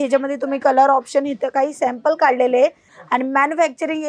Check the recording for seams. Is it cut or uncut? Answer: cut